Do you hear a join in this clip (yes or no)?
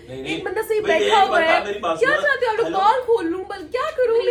no